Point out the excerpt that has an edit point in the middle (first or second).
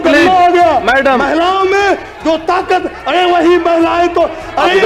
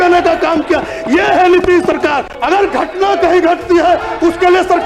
second